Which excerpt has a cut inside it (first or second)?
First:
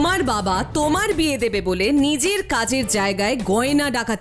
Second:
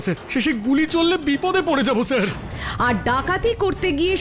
second